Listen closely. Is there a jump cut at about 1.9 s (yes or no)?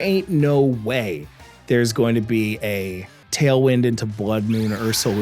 no